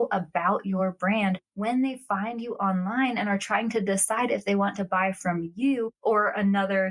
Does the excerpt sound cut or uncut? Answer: uncut